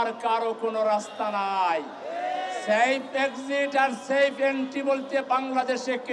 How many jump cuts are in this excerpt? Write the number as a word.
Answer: zero